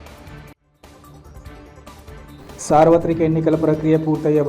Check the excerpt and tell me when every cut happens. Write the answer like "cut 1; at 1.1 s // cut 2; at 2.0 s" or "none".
none